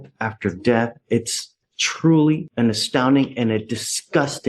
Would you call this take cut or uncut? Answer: uncut